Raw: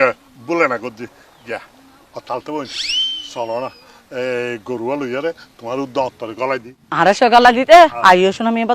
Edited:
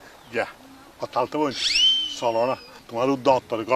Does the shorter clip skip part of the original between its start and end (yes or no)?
yes